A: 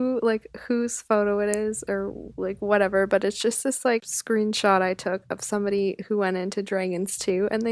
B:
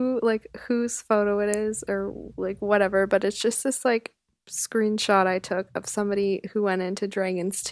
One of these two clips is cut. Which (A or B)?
A